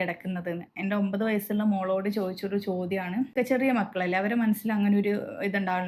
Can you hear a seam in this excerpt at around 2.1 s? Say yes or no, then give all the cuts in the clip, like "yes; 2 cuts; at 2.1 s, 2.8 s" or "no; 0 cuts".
no; 1 cut; at 3.3 s